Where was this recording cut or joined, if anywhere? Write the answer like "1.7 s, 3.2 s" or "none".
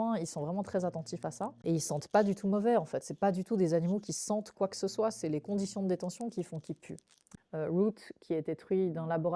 1.6 s, 7.3 s